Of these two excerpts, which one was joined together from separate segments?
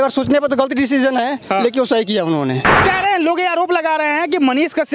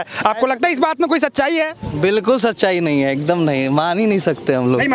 first; 1 cut; at 2.8 s

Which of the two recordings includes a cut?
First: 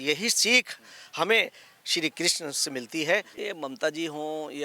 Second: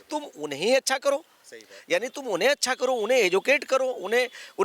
first; 1 cut; at 3.4 s

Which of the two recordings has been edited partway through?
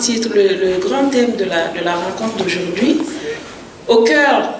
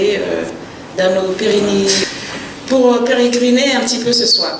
second; 1 cut; at 2.0 s

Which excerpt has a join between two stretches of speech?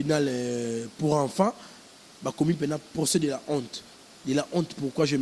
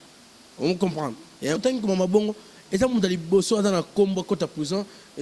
second; 1 cut; at 1.6 s

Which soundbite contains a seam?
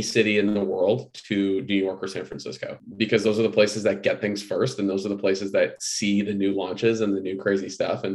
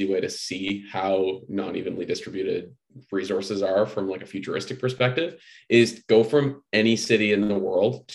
first; 1 cut; at 2.8 s

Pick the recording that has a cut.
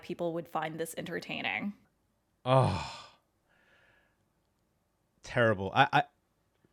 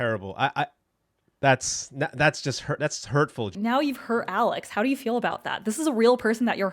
second; 1 cut; at 3.5 s

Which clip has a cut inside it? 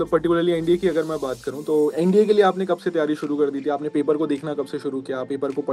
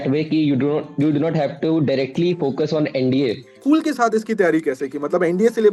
second; 1 cut; at 3.5 s

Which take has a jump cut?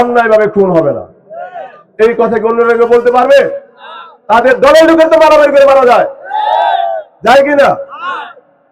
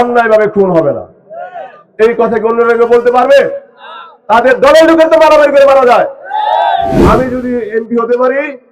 second; 1 cut; at 7.0 s

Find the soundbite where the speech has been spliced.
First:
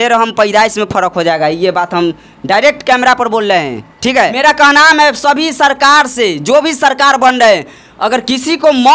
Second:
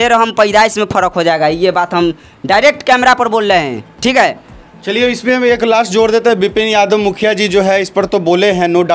first; 1 cut; at 4.3 s

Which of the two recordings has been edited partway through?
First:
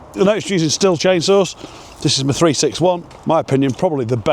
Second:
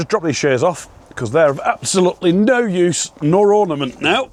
first; 1 cut; at 3.1 s

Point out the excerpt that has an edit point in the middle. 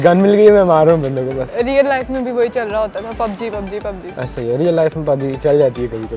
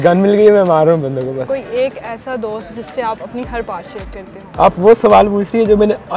second; 2 cuts; at 1.5 s, 4.4 s

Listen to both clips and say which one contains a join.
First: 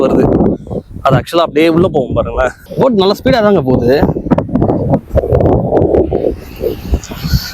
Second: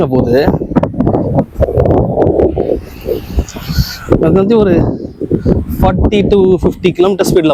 first; 1 cut; at 2.6 s

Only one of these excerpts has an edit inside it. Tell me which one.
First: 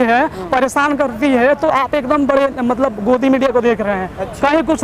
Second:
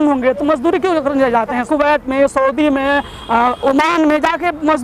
second; 1 cut; at 1.6 s

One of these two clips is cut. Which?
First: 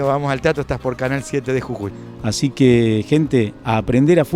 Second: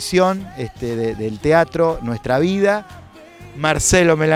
first; 1 cut; at 2.0 s

